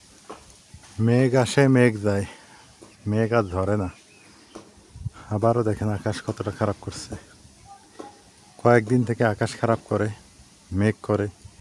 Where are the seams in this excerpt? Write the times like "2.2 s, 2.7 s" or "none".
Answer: none